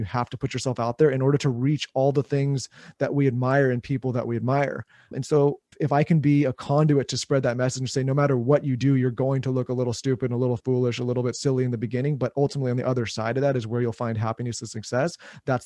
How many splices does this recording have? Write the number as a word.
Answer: one